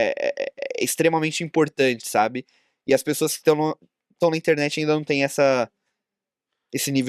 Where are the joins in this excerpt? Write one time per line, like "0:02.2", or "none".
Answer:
none